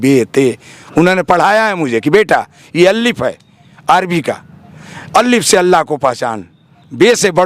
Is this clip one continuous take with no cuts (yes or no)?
yes